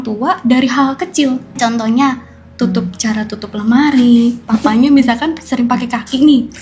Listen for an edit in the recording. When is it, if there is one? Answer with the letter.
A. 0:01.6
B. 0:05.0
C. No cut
A